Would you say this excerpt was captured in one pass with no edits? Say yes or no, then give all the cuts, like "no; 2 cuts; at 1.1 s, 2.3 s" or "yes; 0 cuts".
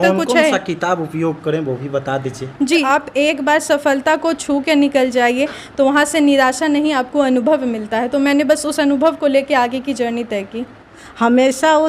no; 2 cuts; at 2.8 s, 11.0 s